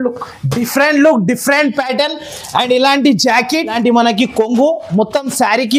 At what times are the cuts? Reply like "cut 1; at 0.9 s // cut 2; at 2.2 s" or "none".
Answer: cut 1; at 3.7 s